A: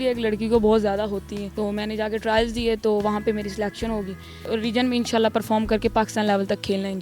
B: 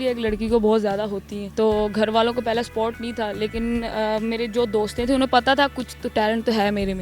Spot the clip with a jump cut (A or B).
A